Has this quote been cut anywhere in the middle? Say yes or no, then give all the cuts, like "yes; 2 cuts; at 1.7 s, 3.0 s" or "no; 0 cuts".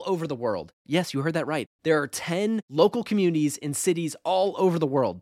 no; 0 cuts